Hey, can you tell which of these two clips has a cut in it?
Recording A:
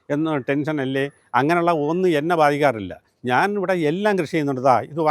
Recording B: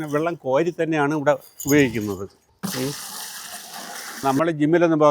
B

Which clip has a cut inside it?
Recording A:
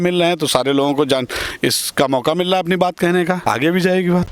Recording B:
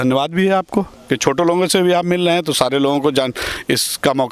A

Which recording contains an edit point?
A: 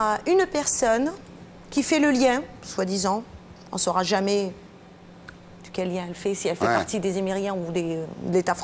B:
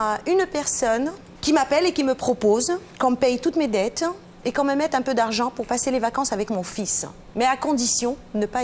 B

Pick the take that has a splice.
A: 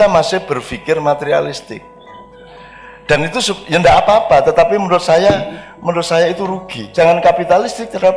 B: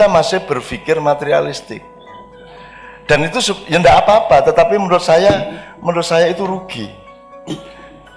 A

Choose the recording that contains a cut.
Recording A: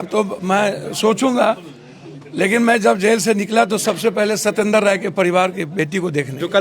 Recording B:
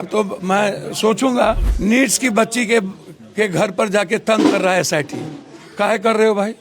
B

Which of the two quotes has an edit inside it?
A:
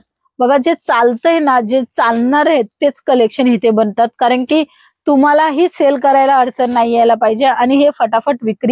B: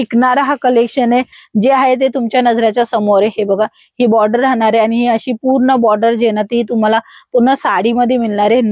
B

